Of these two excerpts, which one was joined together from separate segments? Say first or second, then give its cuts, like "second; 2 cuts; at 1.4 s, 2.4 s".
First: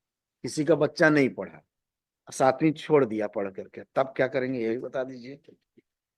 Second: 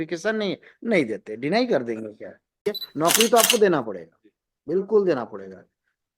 second; 1 cut; at 2.6 s